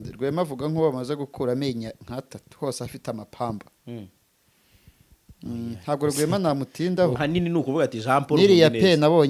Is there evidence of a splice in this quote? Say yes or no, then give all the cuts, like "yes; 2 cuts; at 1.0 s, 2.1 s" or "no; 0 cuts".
yes; 1 cut; at 7.2 s